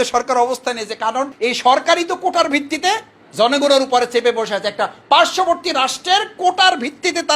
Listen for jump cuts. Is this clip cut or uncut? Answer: cut